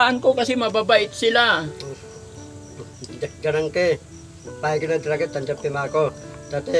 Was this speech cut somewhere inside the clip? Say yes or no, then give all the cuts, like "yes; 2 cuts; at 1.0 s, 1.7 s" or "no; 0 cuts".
no; 0 cuts